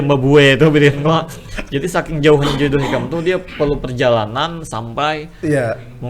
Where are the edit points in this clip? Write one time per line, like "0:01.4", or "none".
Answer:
none